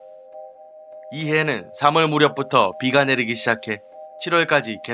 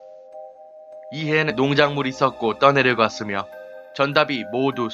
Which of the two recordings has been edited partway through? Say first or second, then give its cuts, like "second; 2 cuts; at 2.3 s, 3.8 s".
first; 1 cut; at 1.5 s